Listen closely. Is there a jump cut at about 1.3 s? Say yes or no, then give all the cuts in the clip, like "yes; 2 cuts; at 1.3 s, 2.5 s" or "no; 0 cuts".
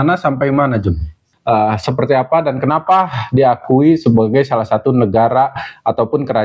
yes; 1 cut; at 1.3 s